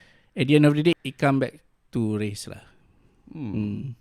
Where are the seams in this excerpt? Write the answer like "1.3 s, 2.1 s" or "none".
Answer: 1.0 s